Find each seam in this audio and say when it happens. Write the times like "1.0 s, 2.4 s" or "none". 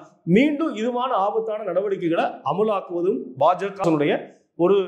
3.8 s